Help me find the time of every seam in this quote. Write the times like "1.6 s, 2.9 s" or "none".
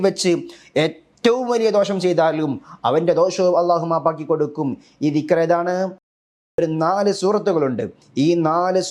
6.1 s